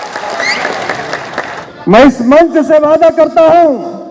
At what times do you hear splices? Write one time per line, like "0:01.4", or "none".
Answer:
0:01.7